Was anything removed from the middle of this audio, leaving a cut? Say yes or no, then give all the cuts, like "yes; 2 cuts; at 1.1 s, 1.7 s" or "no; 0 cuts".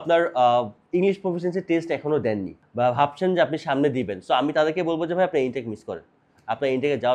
no; 0 cuts